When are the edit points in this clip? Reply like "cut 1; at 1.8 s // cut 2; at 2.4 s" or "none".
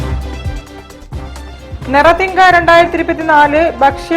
none

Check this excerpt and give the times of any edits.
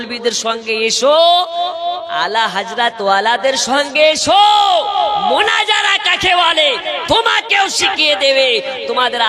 none

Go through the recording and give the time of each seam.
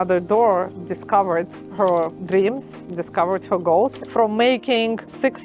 cut 1; at 4.0 s

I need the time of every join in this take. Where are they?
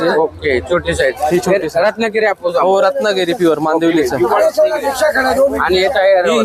none

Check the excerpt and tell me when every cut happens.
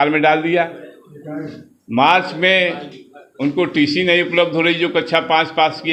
none

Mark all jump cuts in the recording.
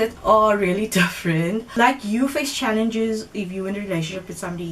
cut 1; at 1.6 s

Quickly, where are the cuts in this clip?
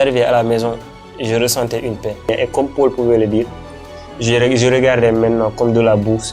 cut 1; at 2.3 s

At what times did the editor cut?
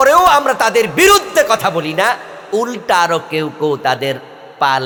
none

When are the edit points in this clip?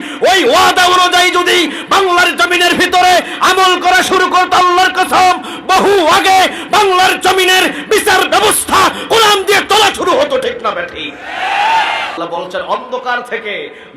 cut 1; at 12.2 s

